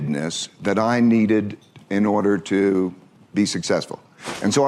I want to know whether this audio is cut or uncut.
uncut